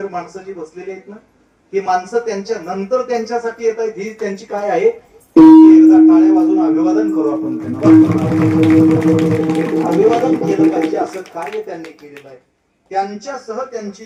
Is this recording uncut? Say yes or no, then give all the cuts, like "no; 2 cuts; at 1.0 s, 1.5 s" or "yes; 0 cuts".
yes; 0 cuts